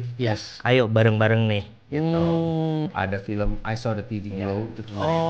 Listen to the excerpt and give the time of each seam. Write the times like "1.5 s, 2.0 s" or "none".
2.9 s